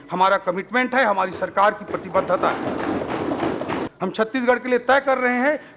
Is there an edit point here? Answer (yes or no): yes